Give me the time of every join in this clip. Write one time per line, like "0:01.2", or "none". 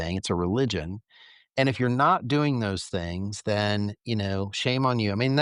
none